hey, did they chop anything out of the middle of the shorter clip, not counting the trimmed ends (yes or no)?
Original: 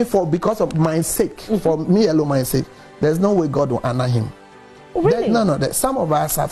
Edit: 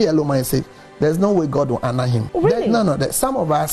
yes